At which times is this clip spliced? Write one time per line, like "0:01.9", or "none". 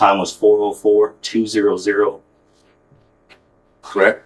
none